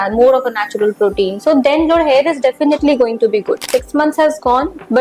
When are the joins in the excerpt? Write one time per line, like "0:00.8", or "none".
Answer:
0:03.7